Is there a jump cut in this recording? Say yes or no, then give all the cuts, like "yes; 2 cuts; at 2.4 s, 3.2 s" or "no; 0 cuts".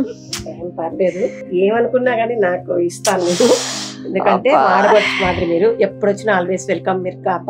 yes; 1 cut; at 1.4 s